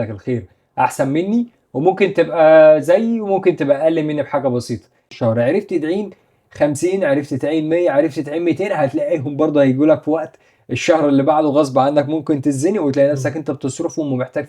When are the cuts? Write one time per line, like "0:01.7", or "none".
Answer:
0:05.1